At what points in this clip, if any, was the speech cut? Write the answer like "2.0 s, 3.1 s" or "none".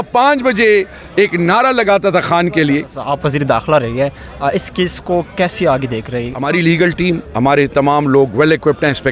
3.0 s, 6.3 s